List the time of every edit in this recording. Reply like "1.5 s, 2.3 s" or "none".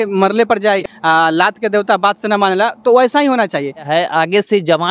0.9 s, 3.9 s

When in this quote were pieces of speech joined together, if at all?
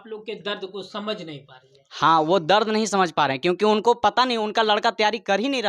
none

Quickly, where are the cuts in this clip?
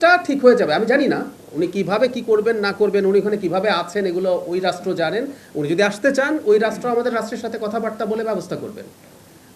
none

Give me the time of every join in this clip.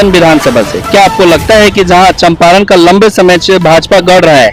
none

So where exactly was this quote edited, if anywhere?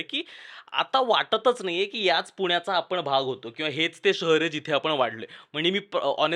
none

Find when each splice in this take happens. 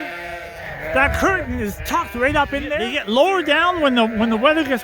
2.9 s

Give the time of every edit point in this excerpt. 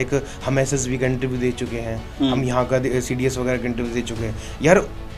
none

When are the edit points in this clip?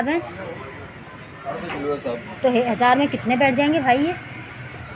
1.5 s

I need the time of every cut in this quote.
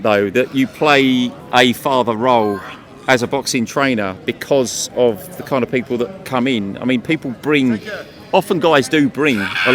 none

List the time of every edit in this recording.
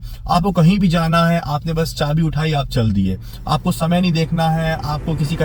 none

